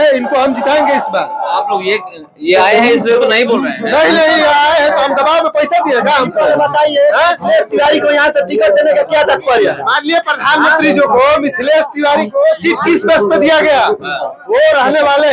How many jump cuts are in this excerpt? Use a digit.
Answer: 0